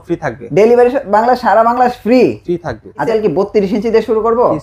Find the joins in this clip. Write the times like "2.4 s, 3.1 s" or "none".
3.1 s